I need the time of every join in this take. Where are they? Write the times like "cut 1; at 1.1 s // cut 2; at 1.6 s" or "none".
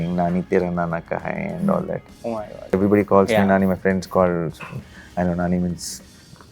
cut 1; at 2.7 s

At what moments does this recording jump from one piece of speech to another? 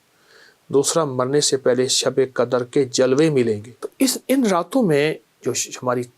cut 1; at 3.7 s

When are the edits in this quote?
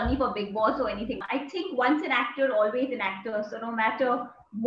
cut 1; at 1.2 s

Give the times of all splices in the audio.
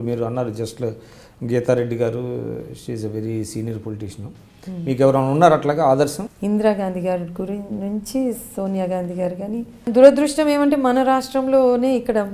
cut 1; at 6.3 s // cut 2; at 9.9 s

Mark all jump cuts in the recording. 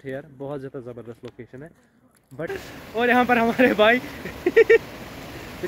cut 1; at 2.5 s

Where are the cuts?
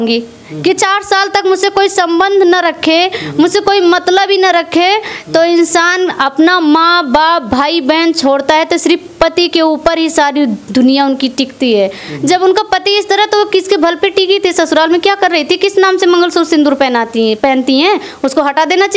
none

